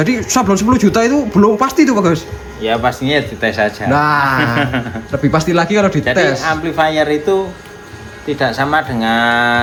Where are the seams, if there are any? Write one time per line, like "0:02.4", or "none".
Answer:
none